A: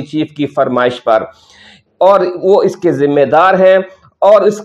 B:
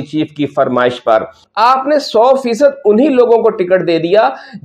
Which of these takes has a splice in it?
B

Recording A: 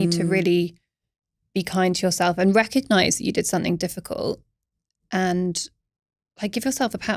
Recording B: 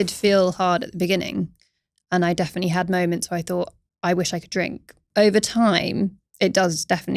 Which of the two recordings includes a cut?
B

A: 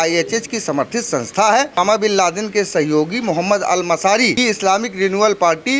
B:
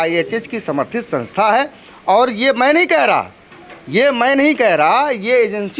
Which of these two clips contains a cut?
A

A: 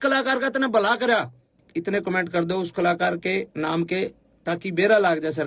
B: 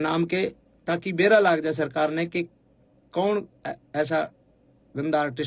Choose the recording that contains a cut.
A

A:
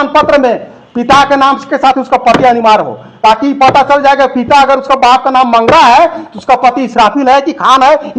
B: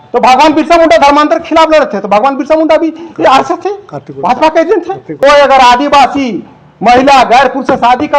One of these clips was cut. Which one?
B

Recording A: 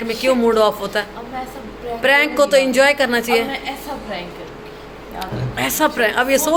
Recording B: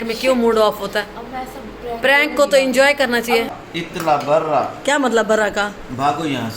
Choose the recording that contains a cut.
B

